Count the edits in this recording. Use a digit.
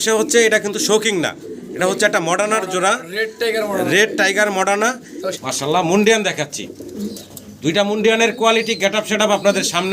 1